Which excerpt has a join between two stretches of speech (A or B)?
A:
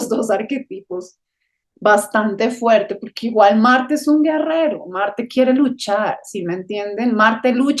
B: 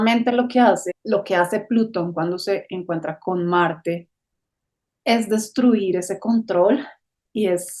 B